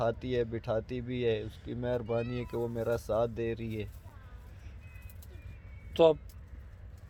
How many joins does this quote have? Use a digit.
0